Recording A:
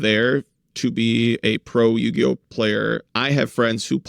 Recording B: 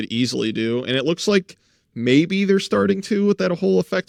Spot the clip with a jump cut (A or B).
A